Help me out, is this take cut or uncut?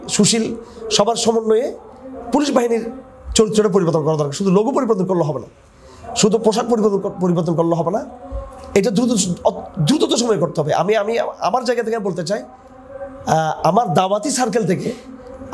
uncut